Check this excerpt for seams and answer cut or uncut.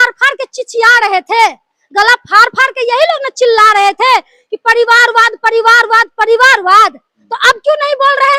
uncut